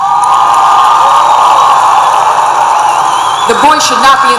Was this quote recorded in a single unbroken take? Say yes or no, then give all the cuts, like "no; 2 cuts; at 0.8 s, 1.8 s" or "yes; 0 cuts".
yes; 0 cuts